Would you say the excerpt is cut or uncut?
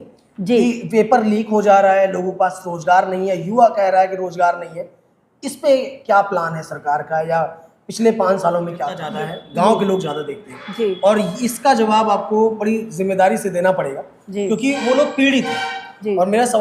cut